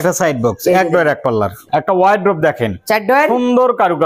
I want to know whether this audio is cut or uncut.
cut